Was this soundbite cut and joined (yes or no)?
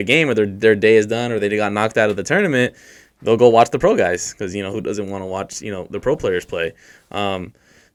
no